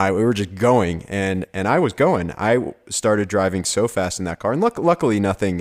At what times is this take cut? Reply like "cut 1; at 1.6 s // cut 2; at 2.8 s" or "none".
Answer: none